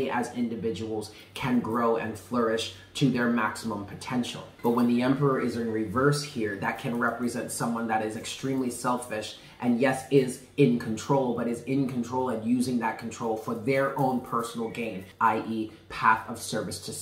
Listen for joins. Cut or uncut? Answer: cut